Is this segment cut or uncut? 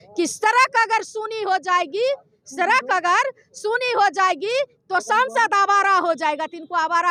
uncut